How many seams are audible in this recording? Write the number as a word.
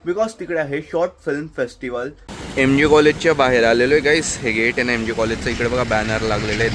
one